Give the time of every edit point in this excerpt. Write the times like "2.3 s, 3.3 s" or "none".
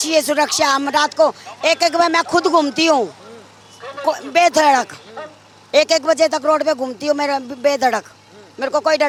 none